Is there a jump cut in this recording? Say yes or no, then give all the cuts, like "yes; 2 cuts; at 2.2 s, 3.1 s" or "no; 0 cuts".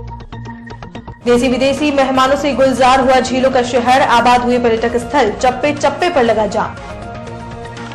yes; 1 cut; at 1.0 s